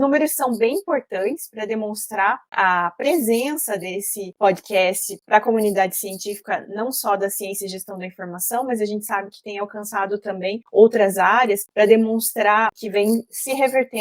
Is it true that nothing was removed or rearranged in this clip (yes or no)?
no